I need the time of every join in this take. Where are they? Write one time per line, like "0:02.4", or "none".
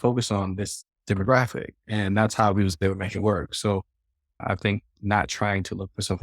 0:04.9